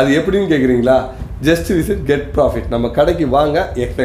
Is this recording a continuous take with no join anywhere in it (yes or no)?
yes